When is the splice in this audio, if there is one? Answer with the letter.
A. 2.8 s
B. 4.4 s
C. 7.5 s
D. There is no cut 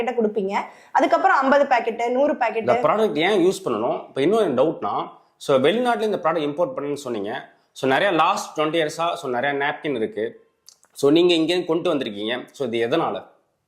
A